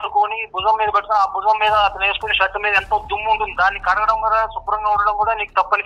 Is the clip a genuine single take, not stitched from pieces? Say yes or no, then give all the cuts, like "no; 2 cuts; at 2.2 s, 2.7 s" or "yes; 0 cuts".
yes; 0 cuts